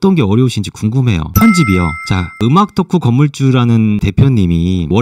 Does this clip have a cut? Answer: yes; 1 cut; at 1.3 s

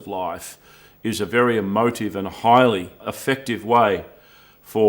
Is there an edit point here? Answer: yes; 1 cut; at 3.1 s

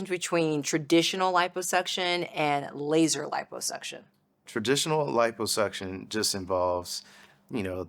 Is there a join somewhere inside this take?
yes; 1 cut; at 4.5 s

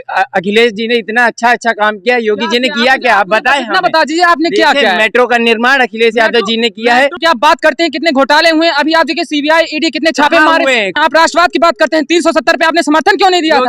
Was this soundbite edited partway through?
yes; 2 cuts; at 7.2 s, 10.9 s

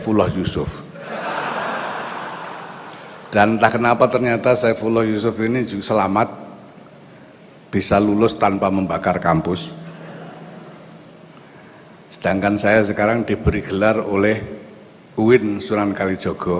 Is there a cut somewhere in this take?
yes; 1 cut; at 3.2 s

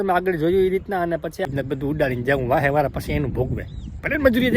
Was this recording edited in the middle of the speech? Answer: yes; 1 cut; at 1.5 s

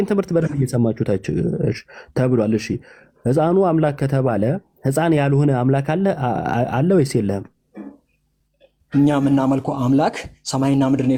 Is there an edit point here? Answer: no; 0 cuts

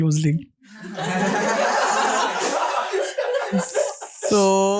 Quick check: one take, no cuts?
yes; 0 cuts

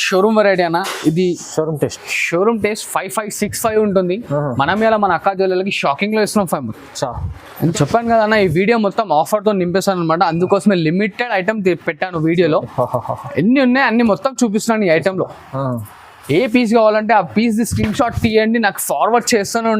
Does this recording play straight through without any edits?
no; 1 cut; at 7.7 s

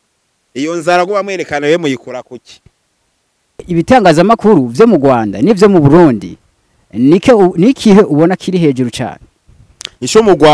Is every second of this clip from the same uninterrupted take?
no; 1 cut; at 3.7 s

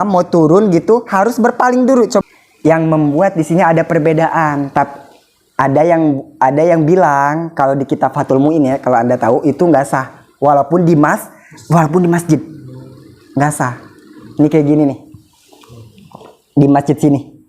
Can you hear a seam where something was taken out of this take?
yes; 1 cut; at 2.2 s

